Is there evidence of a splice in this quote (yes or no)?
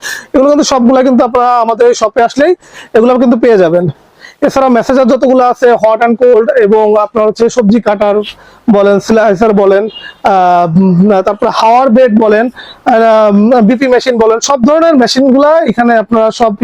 no